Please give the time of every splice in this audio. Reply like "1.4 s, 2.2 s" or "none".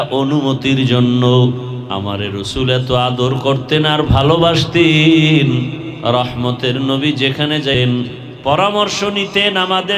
1.8 s, 5.9 s, 7.8 s